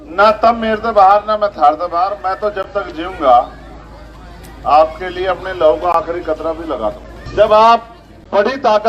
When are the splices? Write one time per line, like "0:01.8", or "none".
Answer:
0:07.1